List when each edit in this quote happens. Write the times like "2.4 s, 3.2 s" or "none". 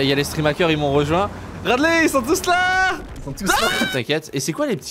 3.9 s

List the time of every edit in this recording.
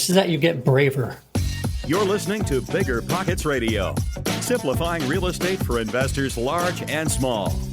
1.2 s

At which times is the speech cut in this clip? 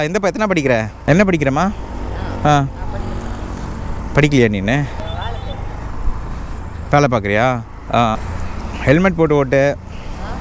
0.9 s, 5.0 s, 8.2 s

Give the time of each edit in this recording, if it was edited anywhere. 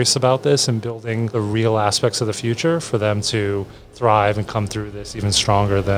1.3 s

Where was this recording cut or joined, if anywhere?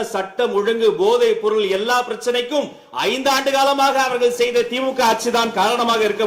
none

